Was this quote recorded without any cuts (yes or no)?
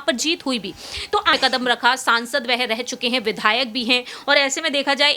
no